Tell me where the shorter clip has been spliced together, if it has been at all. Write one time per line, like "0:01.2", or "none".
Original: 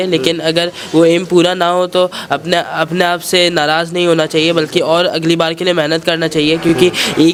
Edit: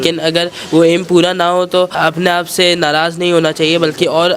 0:01.9